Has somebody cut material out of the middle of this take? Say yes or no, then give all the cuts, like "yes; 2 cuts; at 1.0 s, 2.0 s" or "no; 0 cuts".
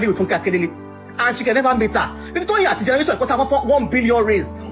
no; 0 cuts